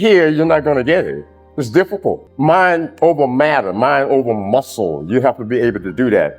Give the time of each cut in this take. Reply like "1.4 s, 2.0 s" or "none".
2.3 s